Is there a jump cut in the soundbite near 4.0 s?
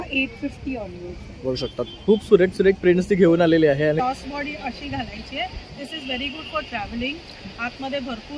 yes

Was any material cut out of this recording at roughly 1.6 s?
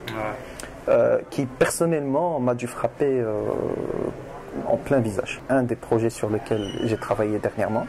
no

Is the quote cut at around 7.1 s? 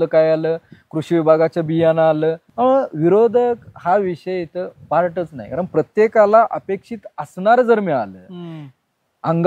no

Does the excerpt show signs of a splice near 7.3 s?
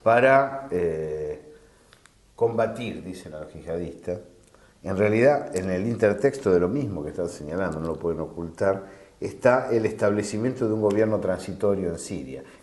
yes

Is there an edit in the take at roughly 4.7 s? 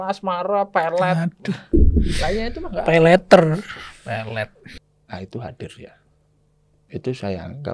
yes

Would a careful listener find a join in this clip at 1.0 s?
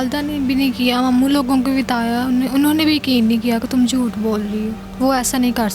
no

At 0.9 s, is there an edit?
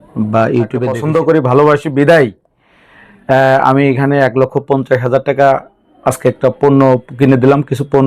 yes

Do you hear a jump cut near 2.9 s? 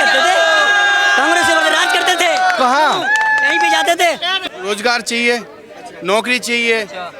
no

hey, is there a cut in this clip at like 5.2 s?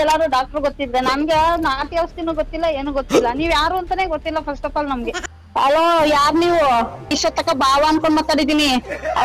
yes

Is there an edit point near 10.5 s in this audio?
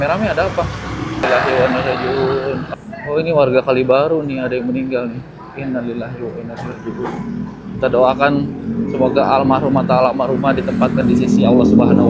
no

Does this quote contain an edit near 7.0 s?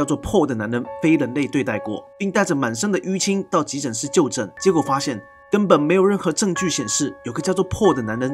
no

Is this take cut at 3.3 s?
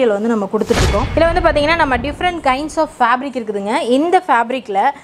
no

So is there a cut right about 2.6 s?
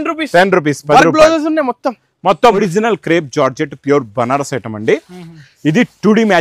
yes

